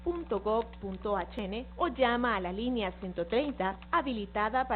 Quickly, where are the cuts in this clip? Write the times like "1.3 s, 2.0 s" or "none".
1.4 s